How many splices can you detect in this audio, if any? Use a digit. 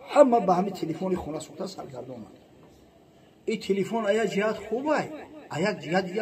0